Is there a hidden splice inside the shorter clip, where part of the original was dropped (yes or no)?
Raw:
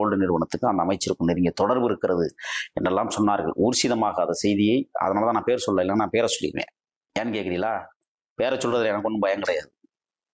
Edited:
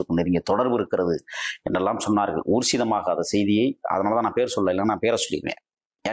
no